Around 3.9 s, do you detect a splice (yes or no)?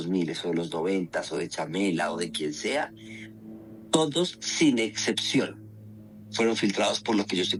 no